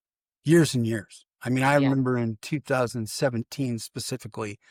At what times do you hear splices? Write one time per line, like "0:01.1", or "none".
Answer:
none

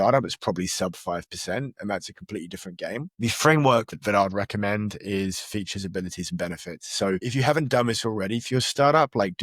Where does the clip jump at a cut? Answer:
0:03.1
0:03.9
0:07.3

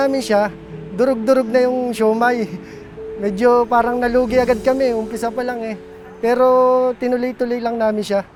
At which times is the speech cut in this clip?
none

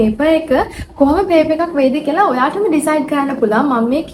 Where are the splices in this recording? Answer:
none

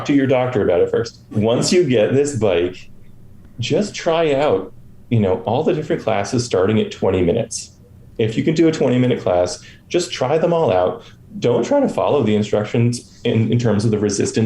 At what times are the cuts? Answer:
0:01.4

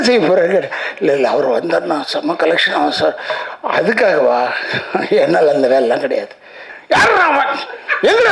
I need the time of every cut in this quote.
0:06.6

